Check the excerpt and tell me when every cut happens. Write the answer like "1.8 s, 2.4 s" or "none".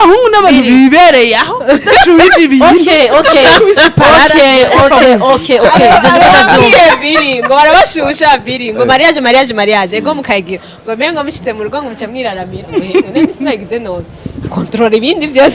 none